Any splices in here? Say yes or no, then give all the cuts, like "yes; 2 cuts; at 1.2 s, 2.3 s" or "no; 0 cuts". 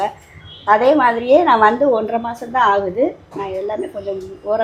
no; 0 cuts